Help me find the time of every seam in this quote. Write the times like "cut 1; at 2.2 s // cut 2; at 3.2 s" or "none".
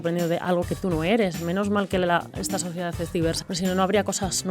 cut 1; at 3.4 s